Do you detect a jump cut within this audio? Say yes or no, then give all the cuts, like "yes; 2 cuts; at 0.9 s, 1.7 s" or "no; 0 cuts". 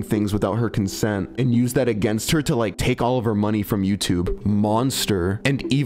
yes; 1 cut; at 4.3 s